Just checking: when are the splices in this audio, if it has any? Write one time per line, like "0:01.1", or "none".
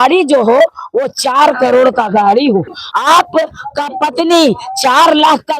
0:02.8